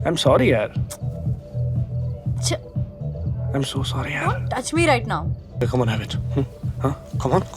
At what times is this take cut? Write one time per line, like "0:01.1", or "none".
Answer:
0:05.6